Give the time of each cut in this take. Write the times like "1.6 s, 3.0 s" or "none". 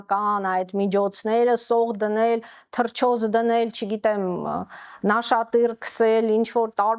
none